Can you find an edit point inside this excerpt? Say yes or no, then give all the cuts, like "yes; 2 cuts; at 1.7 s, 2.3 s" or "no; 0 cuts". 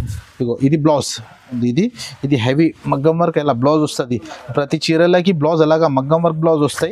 yes; 1 cut; at 1.6 s